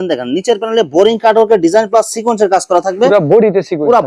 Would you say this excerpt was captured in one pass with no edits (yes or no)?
yes